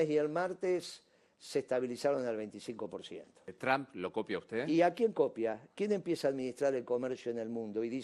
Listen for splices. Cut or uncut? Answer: cut